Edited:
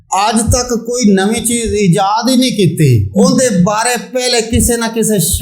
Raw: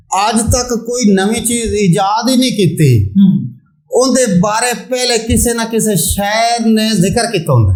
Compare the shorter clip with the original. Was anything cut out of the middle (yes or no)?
yes